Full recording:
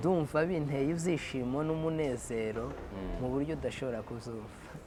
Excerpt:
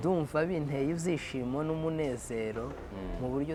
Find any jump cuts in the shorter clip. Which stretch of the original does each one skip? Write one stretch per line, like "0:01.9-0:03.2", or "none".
none